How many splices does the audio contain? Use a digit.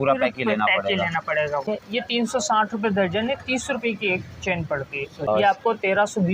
2